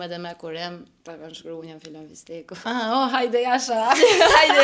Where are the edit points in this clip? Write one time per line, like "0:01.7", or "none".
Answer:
0:00.9
0:02.6